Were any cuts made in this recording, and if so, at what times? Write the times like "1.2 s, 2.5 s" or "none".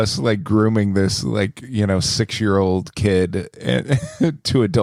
none